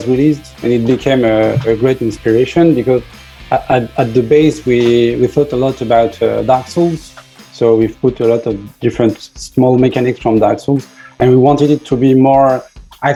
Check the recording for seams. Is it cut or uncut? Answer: uncut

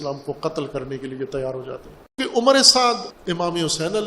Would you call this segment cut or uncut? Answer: cut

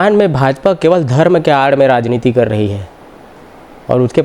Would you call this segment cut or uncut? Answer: uncut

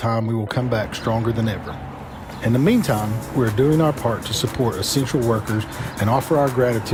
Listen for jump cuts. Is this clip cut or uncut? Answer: uncut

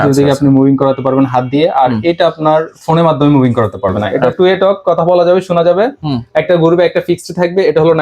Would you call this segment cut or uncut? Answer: cut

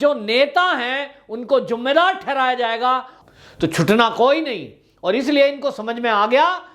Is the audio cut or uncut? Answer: cut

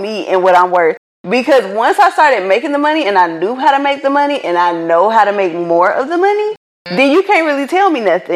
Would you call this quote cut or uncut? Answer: uncut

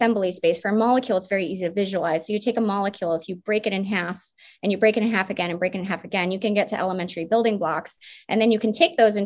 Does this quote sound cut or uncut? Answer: uncut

